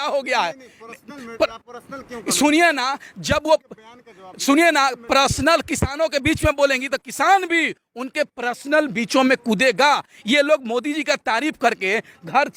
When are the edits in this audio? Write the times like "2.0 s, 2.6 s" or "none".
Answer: none